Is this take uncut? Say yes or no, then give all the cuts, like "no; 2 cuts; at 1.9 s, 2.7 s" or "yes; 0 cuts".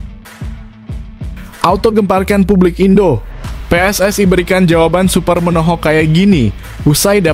no; 1 cut; at 1.5 s